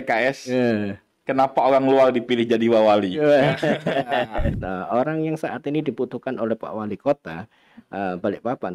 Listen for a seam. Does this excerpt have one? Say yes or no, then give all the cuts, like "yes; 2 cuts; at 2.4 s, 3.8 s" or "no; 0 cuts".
yes; 1 cut; at 4.6 s